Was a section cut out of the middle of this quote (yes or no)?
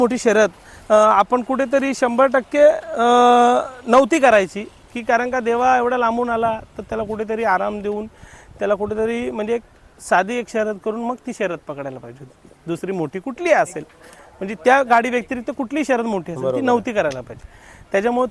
no